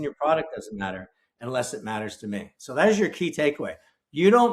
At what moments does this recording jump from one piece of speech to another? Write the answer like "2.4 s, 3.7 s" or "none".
none